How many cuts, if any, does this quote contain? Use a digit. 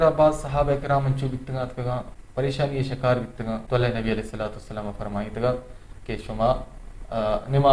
2